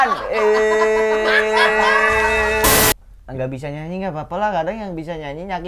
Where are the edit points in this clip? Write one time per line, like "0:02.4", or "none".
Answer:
0:02.9